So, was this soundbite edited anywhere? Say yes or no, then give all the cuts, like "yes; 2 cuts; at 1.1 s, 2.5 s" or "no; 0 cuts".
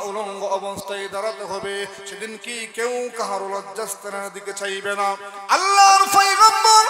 yes; 1 cut; at 5.3 s